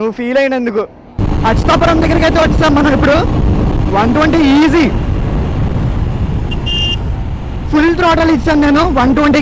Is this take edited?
yes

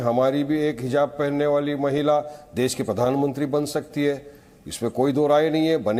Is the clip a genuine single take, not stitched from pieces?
yes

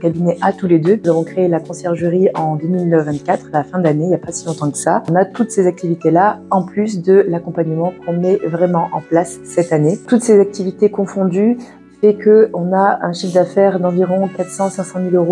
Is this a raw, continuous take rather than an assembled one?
no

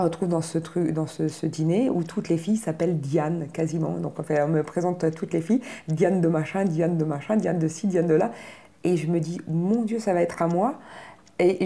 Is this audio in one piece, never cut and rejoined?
yes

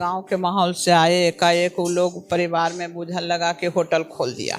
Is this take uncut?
yes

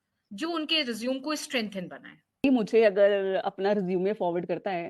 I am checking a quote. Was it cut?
yes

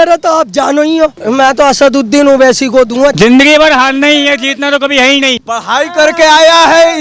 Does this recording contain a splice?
yes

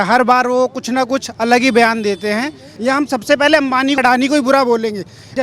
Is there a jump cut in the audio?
yes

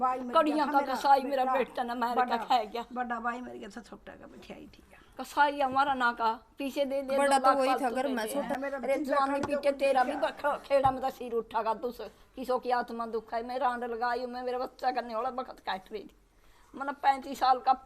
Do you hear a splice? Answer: yes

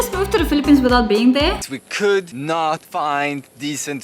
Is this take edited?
yes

